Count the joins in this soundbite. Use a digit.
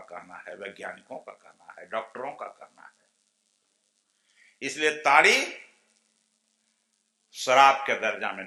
0